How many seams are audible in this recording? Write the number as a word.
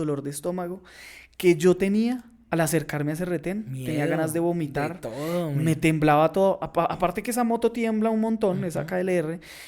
zero